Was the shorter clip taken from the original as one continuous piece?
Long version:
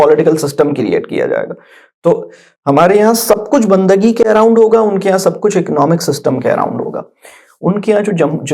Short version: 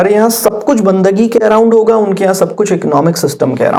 yes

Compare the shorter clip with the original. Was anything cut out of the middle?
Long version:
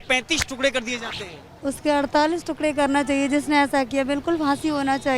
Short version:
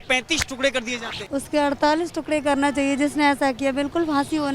yes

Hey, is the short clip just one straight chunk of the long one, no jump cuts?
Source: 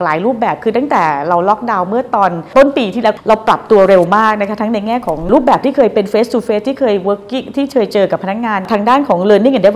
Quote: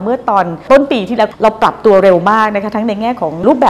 yes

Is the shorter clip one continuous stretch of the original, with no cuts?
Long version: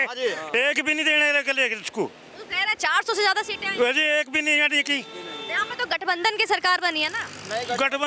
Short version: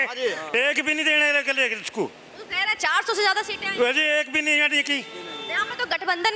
yes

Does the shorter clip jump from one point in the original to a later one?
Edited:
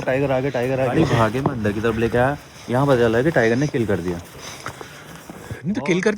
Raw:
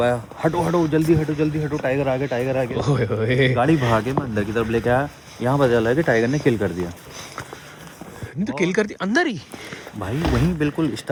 yes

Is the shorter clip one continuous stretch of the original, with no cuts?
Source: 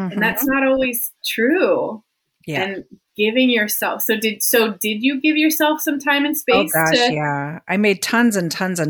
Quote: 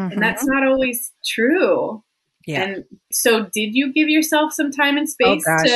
no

